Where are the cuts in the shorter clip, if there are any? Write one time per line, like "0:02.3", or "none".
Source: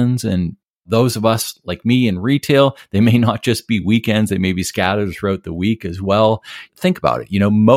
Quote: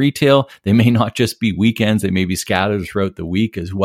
none